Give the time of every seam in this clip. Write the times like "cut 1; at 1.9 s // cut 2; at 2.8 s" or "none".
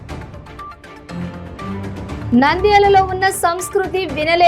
none